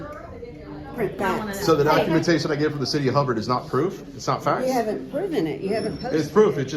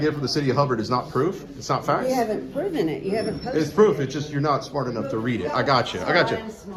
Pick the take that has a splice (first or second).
first